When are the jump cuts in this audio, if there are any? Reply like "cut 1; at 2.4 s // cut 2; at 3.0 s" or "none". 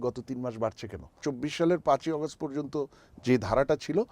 cut 1; at 1.1 s